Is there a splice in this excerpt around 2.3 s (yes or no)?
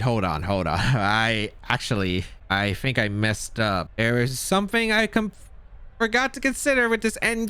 yes